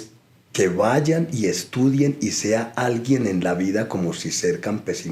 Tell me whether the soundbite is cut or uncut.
uncut